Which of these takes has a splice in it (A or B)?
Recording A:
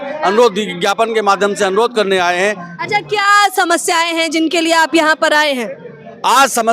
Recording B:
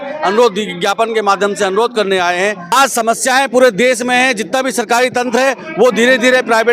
B